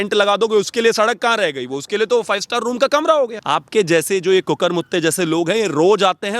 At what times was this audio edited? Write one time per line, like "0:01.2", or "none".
0:03.4